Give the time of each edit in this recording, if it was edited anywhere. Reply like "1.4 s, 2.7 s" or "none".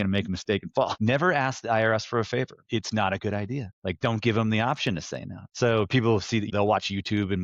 0.9 s, 2.6 s, 3.7 s, 5.4 s, 6.5 s